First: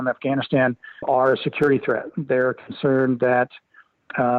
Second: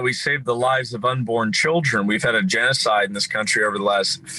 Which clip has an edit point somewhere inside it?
first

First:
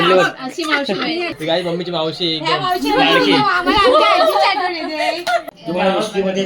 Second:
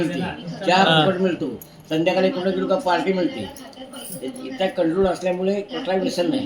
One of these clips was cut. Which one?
first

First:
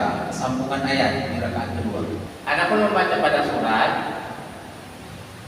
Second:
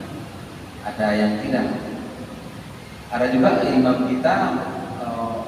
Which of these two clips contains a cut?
first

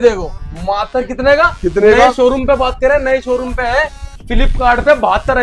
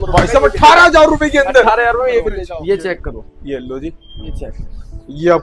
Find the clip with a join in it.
second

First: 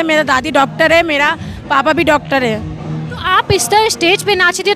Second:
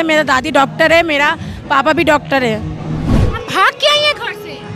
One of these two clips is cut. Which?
second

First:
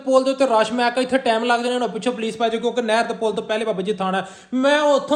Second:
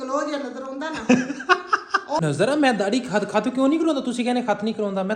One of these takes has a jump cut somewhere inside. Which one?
second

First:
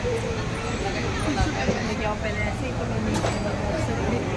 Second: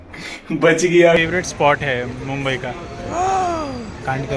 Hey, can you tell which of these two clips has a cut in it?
second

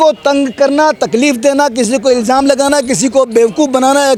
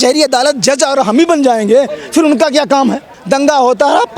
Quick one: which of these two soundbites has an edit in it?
second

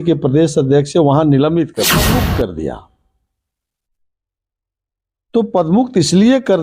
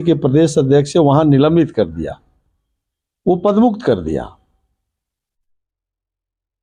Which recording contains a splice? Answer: first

